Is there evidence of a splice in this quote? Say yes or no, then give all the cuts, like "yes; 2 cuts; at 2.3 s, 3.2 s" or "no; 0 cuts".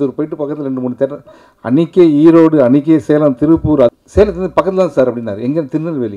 yes; 1 cut; at 3.9 s